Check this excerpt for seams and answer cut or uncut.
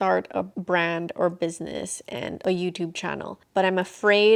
uncut